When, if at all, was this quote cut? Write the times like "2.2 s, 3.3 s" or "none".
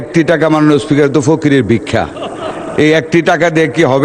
none

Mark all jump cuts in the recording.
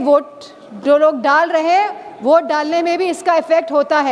none

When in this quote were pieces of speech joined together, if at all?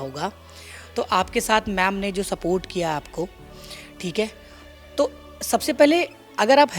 none

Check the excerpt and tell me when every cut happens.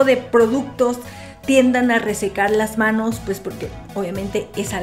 none

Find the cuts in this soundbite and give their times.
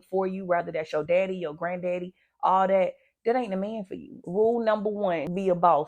4.2 s

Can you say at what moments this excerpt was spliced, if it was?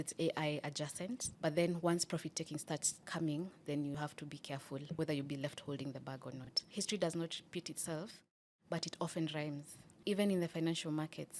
6.5 s

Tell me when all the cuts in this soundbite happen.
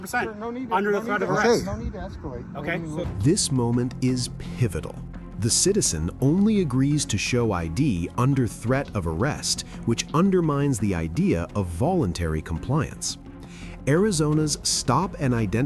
none

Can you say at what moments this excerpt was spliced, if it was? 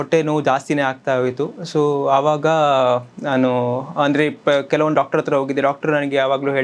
none

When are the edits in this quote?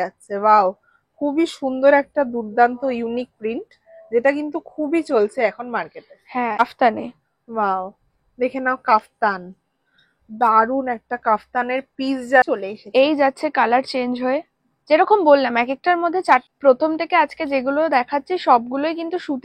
6.6 s, 12.5 s, 16.5 s

